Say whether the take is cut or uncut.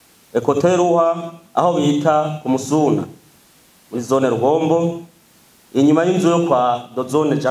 uncut